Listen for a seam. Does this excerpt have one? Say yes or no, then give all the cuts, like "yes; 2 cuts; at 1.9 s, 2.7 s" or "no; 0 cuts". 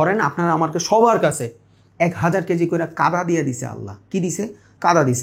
no; 0 cuts